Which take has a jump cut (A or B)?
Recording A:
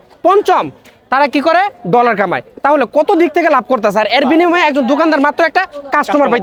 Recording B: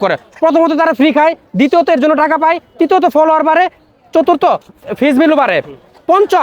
B